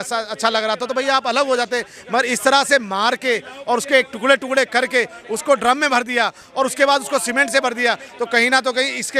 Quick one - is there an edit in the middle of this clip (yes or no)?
no